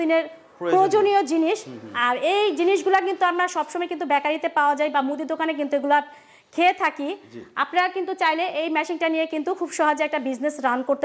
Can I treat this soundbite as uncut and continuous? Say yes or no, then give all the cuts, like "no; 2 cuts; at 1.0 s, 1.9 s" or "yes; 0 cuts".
yes; 0 cuts